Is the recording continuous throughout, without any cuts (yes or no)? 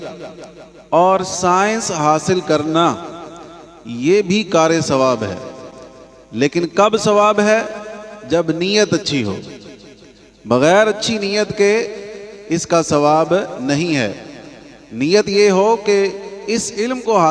yes